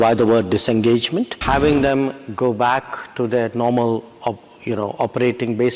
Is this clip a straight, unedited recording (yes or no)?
no